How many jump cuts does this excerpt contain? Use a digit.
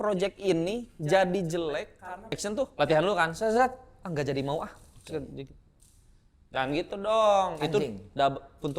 1